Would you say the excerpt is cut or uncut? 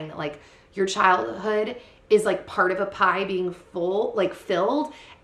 uncut